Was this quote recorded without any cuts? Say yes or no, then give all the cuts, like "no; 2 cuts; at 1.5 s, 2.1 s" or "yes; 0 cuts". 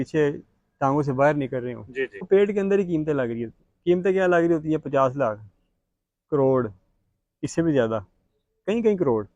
no; 1 cut; at 2.3 s